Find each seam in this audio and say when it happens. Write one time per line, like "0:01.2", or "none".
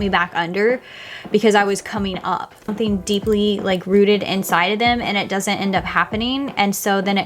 0:02.6